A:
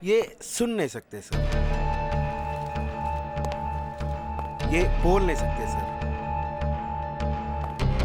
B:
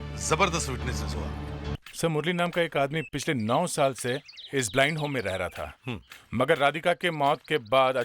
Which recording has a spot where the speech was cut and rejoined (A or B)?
B